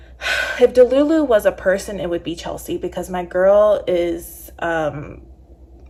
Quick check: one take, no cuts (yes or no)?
yes